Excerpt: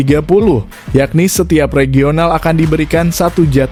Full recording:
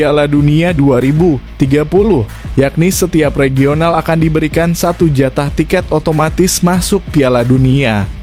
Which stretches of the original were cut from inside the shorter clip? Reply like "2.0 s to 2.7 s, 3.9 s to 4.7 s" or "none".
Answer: none